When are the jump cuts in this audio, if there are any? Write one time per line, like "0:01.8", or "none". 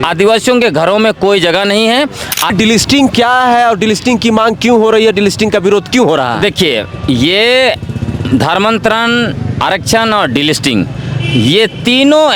0:02.5

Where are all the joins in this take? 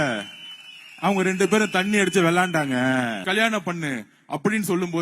0:03.2

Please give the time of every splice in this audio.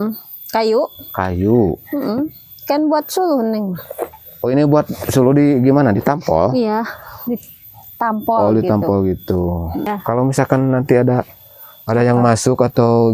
0:09.9

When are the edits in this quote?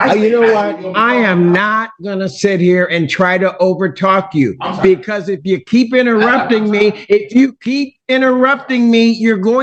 none

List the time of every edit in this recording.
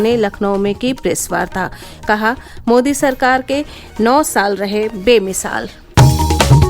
0:05.8

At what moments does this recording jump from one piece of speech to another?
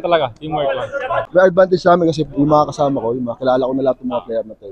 0:01.2

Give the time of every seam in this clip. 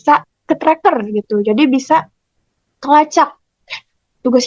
none

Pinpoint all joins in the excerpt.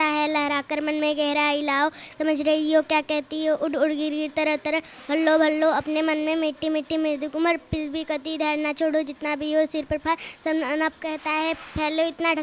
none

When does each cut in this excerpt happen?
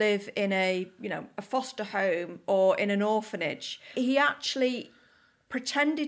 0:03.9

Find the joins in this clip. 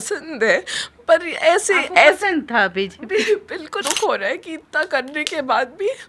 0:03.7

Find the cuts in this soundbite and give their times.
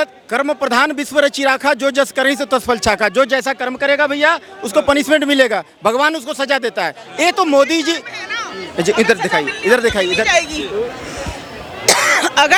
none

